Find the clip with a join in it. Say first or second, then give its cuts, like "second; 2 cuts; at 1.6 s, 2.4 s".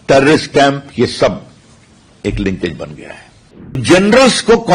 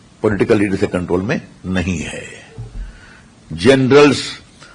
first; 1 cut; at 3.8 s